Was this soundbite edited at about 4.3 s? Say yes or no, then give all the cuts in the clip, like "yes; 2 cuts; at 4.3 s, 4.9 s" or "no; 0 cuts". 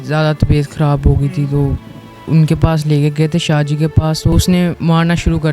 yes; 1 cut; at 4.3 s